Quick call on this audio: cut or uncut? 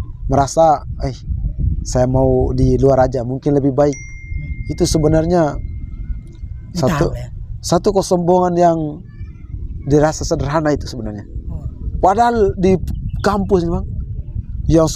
uncut